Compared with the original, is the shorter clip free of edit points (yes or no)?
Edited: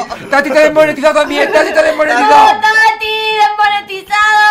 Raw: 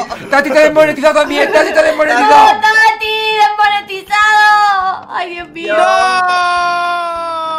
yes